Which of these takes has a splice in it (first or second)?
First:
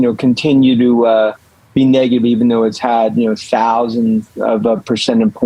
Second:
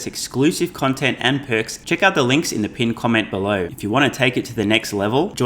second